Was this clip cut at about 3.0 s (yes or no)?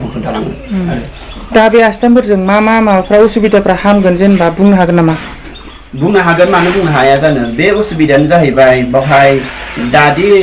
no